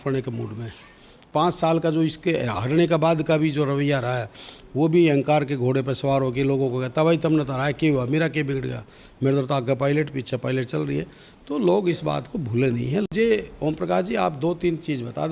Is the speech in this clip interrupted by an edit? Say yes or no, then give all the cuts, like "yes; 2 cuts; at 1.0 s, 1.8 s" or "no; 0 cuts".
yes; 2 cuts; at 1.2 s, 13.1 s